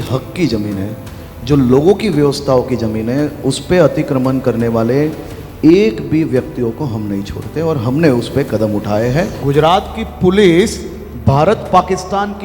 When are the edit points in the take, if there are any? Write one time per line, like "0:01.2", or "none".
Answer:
0:09.4